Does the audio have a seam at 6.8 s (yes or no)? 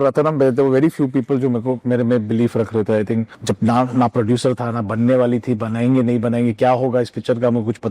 no